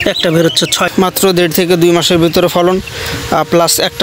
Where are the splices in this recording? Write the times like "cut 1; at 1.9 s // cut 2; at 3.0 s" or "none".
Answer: cut 1; at 0.9 s

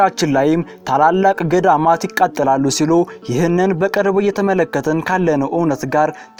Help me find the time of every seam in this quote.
none

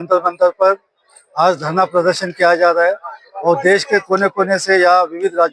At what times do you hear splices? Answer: none

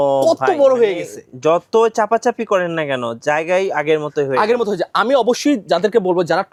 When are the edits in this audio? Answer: none

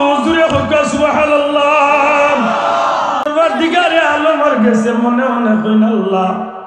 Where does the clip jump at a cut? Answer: cut 1; at 3.3 s

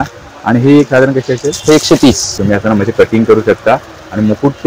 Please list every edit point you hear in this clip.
cut 1; at 2.4 s

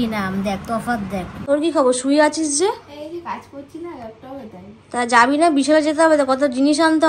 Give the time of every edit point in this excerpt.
cut 1; at 1.3 s

